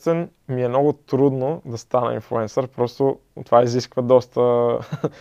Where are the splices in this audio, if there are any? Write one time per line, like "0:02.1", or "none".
none